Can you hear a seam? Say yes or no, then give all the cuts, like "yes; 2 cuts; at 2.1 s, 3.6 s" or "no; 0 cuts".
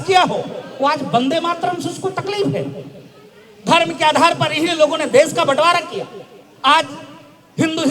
no; 0 cuts